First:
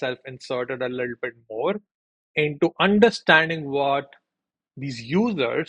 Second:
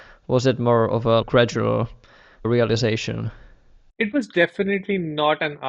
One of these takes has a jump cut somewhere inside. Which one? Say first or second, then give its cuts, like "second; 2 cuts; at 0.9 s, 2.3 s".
second; 3 cuts; at 1.2 s, 2.4 s, 3.8 s